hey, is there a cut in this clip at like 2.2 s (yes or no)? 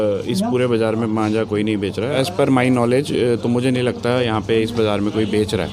yes